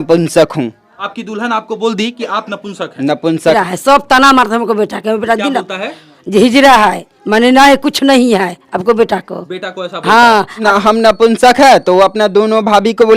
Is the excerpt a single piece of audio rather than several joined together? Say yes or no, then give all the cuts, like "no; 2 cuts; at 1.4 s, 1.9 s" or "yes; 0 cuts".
no; 3 cuts; at 1.0 s, 3.5 s, 10.6 s